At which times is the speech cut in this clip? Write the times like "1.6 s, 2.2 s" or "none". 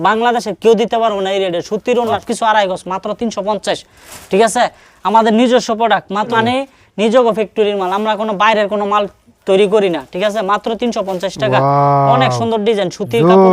2.2 s, 6.3 s